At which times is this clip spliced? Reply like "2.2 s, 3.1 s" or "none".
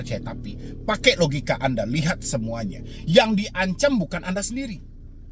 none